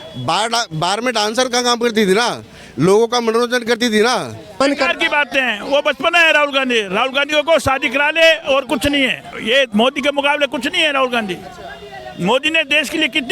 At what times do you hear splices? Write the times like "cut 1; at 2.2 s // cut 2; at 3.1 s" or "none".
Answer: cut 1; at 4.6 s // cut 2; at 9.4 s

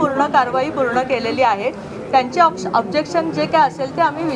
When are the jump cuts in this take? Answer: none

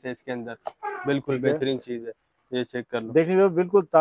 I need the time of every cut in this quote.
none

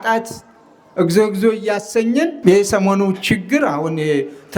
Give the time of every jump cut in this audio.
cut 1; at 2.4 s

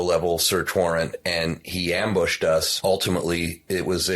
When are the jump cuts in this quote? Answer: cut 1; at 2.7 s

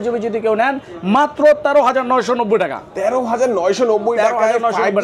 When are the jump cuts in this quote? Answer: none

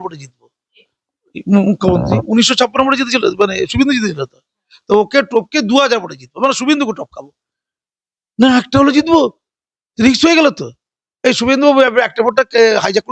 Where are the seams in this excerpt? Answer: none

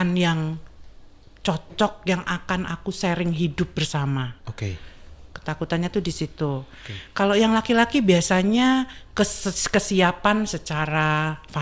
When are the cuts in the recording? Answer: none

